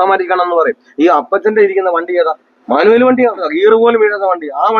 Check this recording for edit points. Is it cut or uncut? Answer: cut